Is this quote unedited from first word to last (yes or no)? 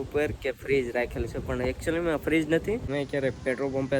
no